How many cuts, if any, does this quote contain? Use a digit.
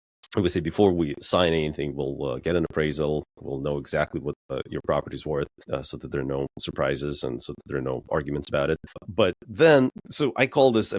4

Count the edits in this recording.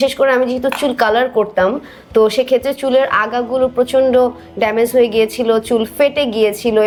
0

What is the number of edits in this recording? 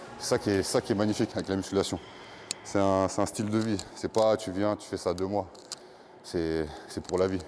0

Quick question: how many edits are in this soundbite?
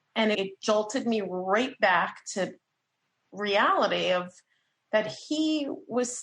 1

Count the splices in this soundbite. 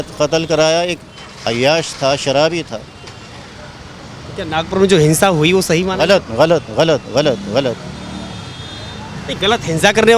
0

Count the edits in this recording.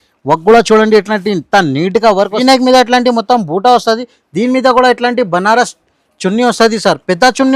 1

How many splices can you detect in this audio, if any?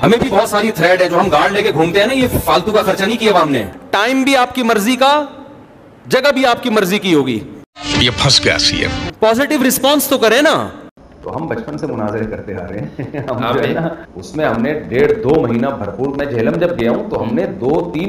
1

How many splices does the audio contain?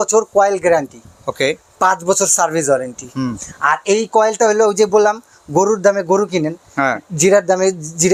0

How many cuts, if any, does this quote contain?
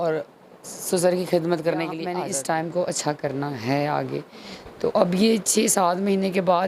1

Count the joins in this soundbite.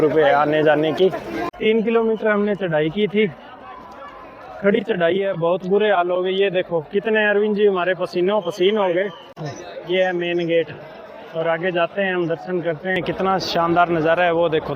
3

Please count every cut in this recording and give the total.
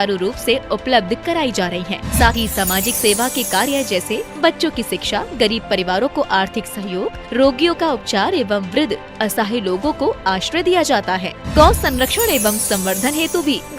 1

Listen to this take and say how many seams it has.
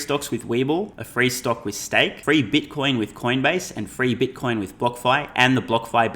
2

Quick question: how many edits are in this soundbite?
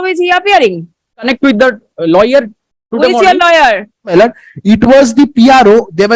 2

